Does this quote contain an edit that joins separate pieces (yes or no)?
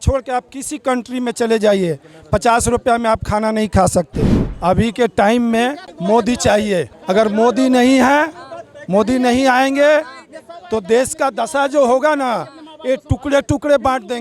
yes